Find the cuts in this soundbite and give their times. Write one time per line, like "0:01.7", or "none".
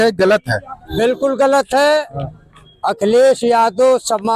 none